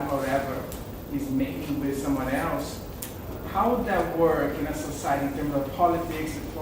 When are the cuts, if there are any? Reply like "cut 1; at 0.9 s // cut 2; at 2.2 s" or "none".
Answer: cut 1; at 1.8 s